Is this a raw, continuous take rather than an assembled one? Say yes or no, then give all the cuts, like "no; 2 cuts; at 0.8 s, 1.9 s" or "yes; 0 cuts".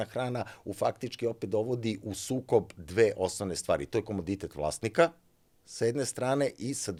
yes; 0 cuts